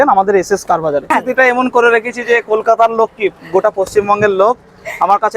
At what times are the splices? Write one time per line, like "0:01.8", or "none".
0:01.1